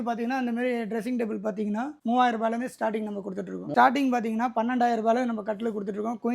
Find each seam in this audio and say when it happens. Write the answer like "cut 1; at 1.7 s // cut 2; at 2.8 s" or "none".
cut 1; at 3.7 s